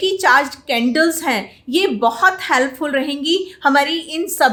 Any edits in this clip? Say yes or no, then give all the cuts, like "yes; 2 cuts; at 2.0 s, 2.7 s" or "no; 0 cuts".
no; 0 cuts